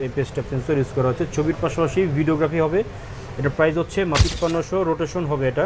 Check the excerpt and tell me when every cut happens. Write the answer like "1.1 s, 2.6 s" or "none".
4.2 s

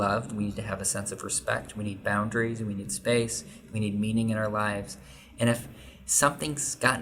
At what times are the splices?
none

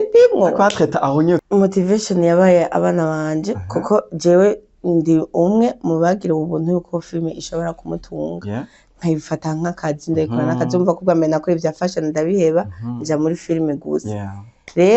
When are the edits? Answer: 1.4 s

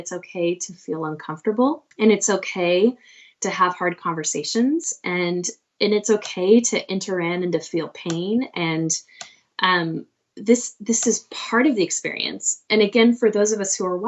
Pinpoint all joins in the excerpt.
1.9 s

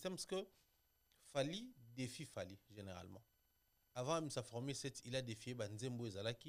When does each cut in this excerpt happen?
none

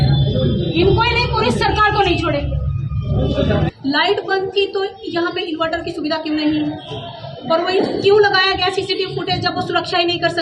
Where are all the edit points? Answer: 3.7 s

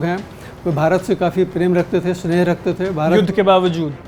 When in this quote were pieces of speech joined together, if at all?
1.5 s

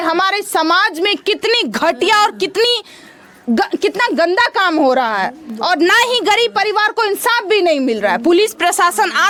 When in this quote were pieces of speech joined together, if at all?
none

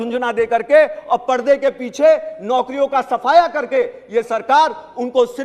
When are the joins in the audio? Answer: none

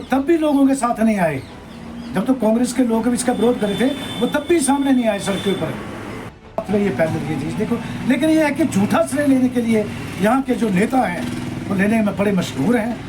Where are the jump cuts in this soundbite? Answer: 6.4 s

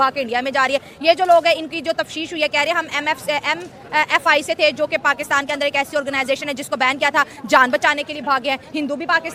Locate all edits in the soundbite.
none

